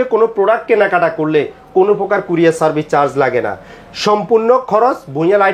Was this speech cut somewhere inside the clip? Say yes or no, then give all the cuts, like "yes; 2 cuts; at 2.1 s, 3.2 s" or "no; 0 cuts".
no; 0 cuts